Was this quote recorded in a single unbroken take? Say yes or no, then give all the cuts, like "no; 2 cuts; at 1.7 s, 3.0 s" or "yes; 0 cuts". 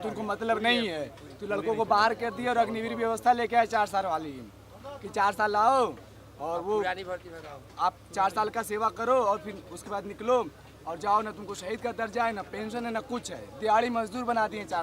yes; 0 cuts